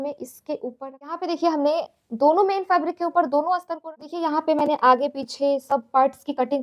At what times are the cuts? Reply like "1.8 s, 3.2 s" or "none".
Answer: 1.1 s, 3.7 s